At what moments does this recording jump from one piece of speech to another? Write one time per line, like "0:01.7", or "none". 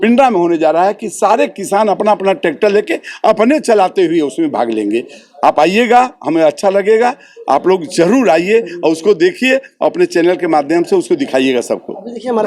none